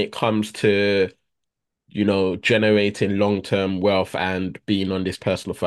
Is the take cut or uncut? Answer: uncut